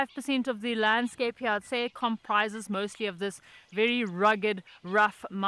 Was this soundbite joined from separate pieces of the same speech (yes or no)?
no